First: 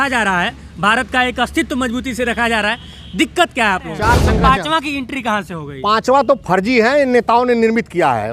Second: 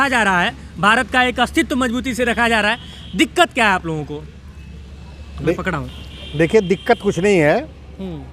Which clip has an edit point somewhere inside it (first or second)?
first